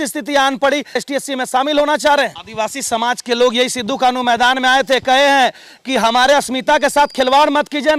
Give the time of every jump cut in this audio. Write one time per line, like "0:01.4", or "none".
0:01.0
0:02.4